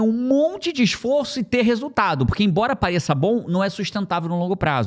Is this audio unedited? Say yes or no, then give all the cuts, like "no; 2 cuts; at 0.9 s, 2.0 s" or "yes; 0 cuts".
yes; 0 cuts